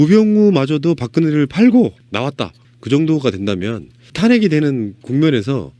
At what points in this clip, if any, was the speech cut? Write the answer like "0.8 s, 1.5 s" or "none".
1.5 s